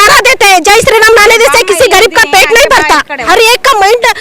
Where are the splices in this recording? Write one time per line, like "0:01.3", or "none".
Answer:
0:03.2